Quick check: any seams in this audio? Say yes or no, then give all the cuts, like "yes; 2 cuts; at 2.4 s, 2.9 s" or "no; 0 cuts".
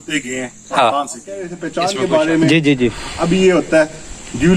yes; 1 cut; at 1.6 s